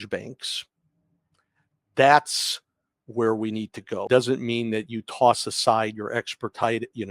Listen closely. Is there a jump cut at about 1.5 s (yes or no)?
no